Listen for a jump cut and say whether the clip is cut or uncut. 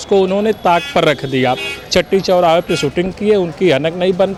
uncut